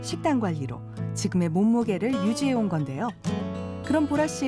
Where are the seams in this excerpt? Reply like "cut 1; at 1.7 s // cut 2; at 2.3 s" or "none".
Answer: none